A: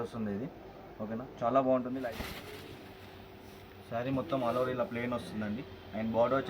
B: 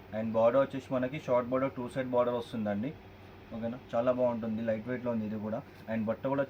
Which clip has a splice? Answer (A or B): A